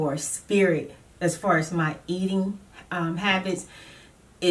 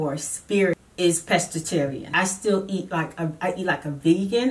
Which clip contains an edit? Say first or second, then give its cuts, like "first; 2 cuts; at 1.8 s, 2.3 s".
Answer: second; 2 cuts; at 0.8 s, 2.1 s